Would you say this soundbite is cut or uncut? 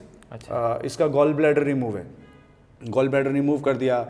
uncut